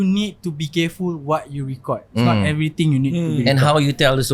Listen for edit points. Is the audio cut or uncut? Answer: uncut